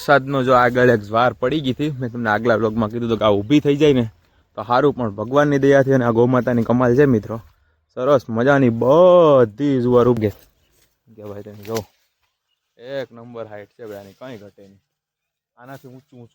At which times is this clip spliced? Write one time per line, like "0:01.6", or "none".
0:10.2